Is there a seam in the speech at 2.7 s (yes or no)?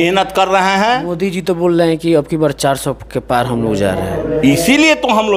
no